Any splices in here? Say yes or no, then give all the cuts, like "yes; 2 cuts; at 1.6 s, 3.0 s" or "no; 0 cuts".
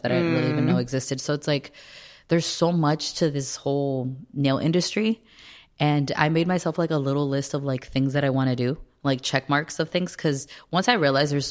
no; 0 cuts